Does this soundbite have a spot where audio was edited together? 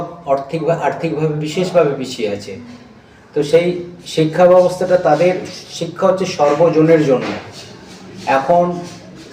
no; 0 cuts

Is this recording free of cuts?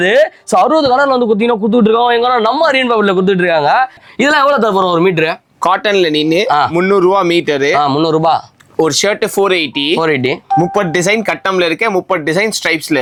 yes; 0 cuts

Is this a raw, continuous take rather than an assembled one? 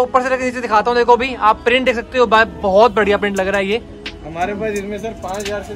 yes; 0 cuts

